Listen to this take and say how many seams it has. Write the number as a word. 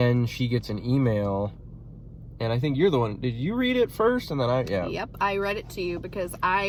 zero